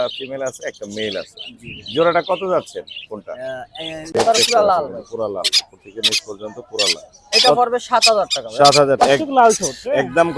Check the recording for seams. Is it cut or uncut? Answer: cut